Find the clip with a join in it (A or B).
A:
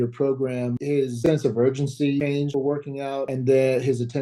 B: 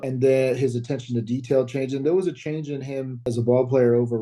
A